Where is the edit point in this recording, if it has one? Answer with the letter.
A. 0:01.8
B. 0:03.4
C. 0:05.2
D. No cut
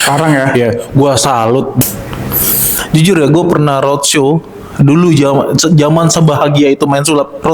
A